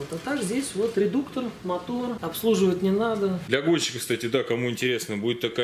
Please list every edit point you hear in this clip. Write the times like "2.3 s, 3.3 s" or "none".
2.3 s, 3.4 s